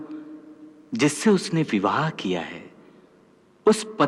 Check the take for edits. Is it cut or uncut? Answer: uncut